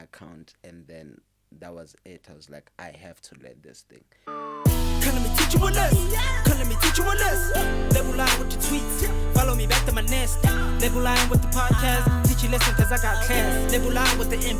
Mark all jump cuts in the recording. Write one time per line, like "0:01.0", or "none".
0:04.3